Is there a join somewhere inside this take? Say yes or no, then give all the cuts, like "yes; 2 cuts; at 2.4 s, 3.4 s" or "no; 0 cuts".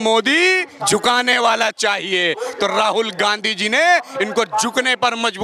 no; 0 cuts